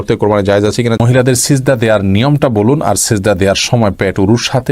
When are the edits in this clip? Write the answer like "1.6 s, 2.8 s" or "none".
1.0 s